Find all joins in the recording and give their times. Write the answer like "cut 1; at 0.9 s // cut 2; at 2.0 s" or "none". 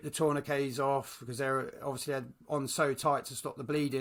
none